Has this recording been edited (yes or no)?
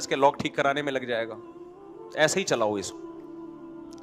yes